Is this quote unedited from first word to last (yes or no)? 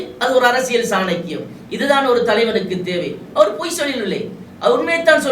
yes